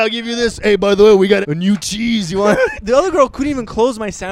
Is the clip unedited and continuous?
no; 2 cuts; at 1.4 s, 2.8 s

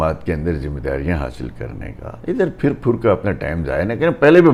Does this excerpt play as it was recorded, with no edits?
yes; 0 cuts

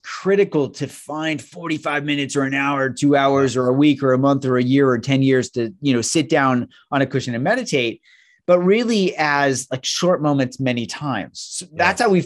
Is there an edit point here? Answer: no; 0 cuts

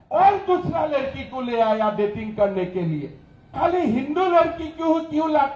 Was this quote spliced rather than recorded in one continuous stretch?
yes; 1 cut; at 3.5 s

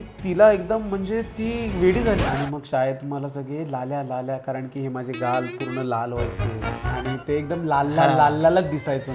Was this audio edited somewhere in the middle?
yes; 1 cut; at 2.3 s

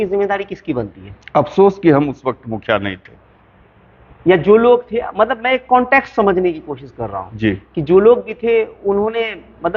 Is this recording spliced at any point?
no; 0 cuts

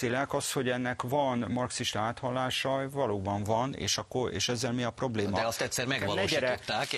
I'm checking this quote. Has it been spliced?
no; 0 cuts

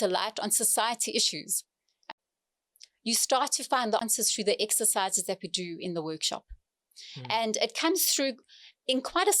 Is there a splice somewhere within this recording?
yes; 2 cuts; at 1.9 s, 4.0 s

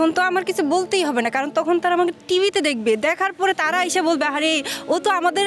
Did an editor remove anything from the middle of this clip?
no; 0 cuts

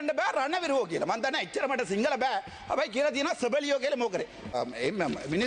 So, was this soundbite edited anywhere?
yes; 1 cut; at 4.5 s

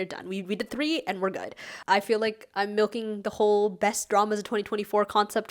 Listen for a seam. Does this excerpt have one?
yes; 1 cut; at 1.7 s

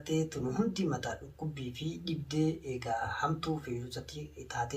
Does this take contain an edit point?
no; 0 cuts

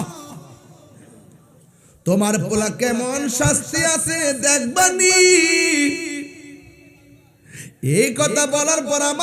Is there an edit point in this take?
no; 0 cuts

